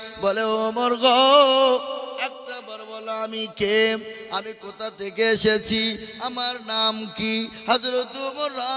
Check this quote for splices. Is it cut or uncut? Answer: uncut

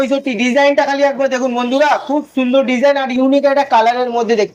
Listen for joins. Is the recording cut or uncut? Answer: uncut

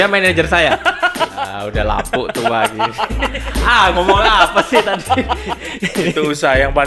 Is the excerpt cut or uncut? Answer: cut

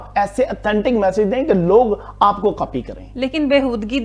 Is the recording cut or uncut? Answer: uncut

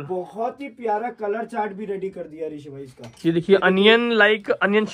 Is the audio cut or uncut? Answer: uncut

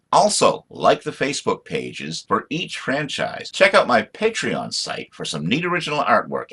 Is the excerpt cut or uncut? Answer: cut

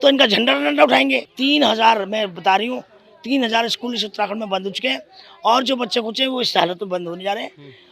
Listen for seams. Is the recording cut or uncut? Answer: cut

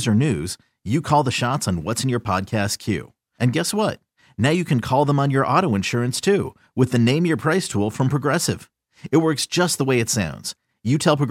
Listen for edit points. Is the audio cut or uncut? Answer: uncut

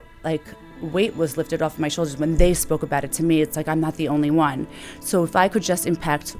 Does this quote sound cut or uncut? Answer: uncut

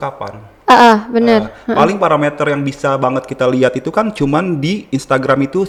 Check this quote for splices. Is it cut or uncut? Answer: uncut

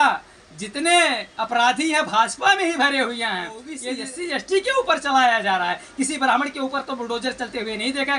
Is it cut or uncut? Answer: cut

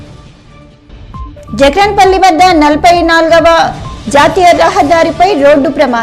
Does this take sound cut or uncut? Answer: uncut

